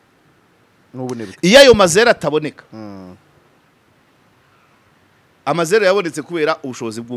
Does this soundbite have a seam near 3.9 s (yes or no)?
no